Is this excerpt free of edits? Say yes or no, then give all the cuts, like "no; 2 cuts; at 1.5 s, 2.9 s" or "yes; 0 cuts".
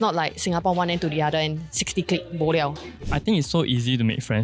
no; 1 cut; at 3.1 s